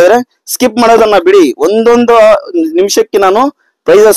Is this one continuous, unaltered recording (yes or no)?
yes